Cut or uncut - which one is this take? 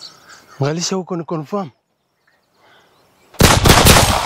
cut